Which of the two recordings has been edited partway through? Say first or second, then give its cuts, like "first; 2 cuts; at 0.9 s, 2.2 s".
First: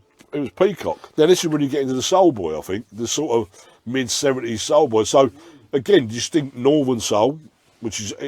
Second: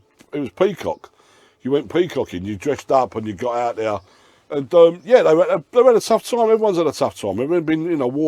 first; 1 cut; at 1.0 s